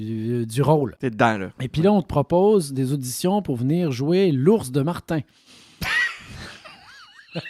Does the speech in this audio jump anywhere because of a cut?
yes; 1 cut; at 1.4 s

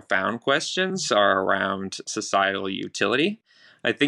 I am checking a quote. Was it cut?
no; 0 cuts

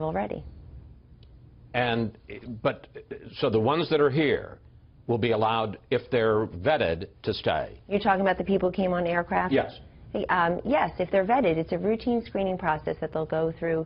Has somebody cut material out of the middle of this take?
yes; 1 cut; at 3.9 s

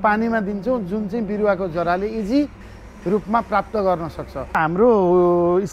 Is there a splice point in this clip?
yes; 1 cut; at 4.6 s

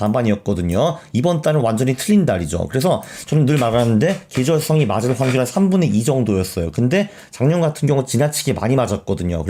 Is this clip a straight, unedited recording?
yes; 0 cuts

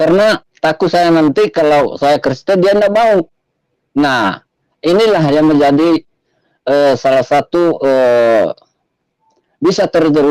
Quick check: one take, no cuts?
yes; 0 cuts

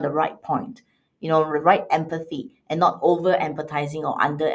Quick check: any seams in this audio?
no; 0 cuts

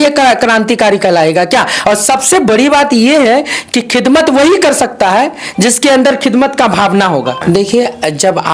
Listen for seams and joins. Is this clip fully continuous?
no; 2 cuts; at 1.7 s, 7.4 s

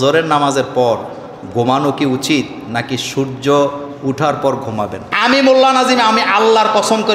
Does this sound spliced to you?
yes; 1 cut; at 5.1 s

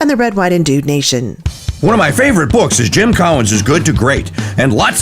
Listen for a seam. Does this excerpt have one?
yes; 1 cut; at 1.4 s

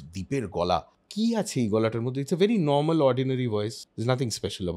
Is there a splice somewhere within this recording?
yes; 2 cuts; at 1.0 s, 3.9 s

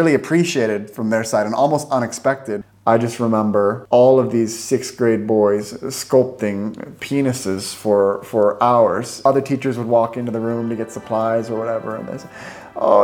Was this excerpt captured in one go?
no; 3 cuts; at 2.6 s, 3.8 s, 9.2 s

